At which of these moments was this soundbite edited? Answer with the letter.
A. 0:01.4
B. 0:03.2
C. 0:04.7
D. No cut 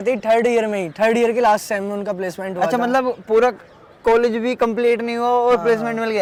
D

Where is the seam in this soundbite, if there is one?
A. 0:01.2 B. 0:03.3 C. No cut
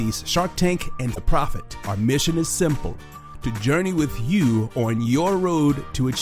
A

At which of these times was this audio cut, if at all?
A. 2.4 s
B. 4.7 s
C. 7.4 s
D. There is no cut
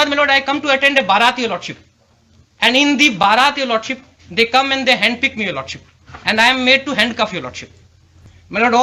D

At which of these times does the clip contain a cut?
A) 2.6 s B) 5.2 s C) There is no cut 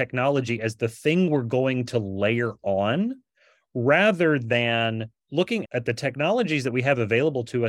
C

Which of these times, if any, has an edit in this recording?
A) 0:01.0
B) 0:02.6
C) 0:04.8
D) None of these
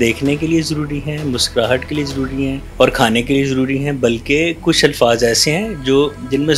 B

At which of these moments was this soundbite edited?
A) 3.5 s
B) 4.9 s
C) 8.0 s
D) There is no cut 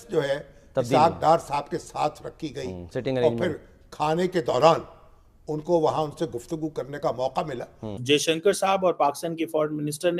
C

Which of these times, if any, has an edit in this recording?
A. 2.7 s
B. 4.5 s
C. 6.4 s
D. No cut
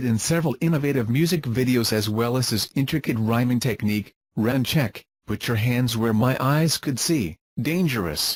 D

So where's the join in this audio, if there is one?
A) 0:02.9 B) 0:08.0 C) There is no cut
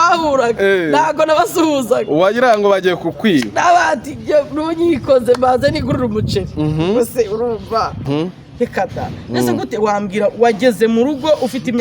B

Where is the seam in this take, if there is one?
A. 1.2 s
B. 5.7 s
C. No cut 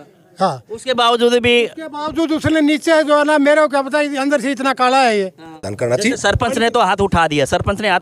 B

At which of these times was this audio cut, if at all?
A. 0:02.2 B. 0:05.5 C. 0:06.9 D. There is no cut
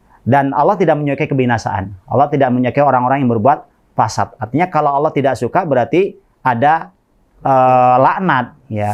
D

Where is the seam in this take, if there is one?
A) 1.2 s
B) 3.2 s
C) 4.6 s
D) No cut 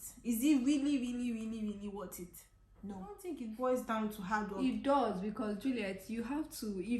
B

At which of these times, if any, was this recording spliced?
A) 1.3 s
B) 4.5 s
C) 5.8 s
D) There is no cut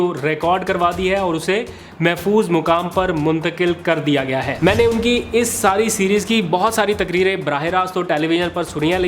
B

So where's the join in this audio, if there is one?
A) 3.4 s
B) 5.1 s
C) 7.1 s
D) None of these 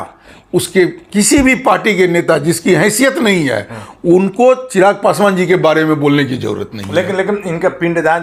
D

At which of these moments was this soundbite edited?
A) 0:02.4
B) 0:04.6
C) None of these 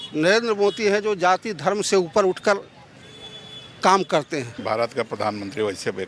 B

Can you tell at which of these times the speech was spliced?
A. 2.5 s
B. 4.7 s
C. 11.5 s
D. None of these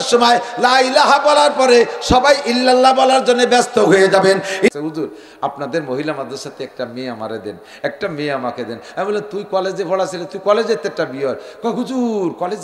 B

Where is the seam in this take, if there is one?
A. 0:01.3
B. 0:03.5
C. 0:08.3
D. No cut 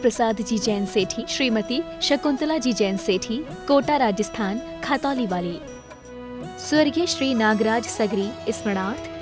A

